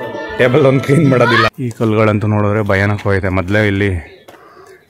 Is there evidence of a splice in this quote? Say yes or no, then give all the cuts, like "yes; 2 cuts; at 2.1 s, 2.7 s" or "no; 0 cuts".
yes; 1 cut; at 1.5 s